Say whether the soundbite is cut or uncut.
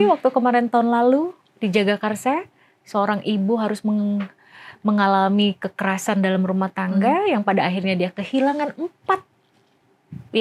uncut